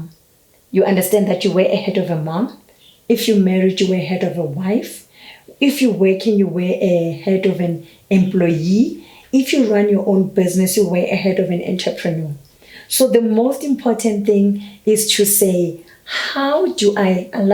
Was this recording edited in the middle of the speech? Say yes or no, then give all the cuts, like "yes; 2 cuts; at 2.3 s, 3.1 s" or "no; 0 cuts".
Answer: no; 0 cuts